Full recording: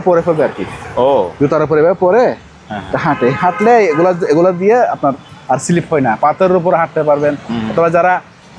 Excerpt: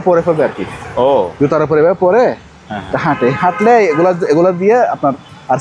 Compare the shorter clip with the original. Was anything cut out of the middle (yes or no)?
no